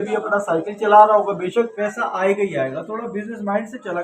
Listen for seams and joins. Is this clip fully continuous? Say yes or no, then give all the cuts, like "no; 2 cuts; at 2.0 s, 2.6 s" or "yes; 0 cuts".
no; 1 cut; at 1.7 s